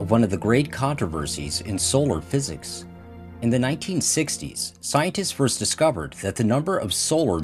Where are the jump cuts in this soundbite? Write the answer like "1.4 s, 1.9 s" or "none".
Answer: 6.0 s